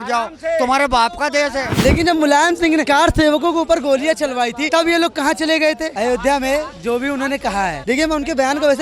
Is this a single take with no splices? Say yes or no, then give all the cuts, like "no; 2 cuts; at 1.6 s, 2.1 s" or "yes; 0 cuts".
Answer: no; 5 cuts; at 1.7 s, 2.9 s, 4.6 s, 5.9 s, 7.8 s